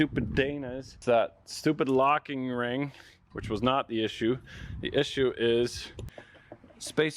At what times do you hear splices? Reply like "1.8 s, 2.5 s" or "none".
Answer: 1.0 s